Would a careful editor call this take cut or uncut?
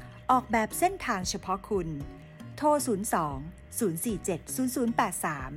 uncut